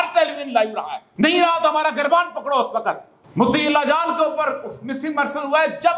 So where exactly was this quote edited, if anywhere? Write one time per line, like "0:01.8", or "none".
0:01.0
0:03.2